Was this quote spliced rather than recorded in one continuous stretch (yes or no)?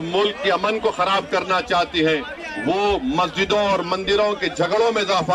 no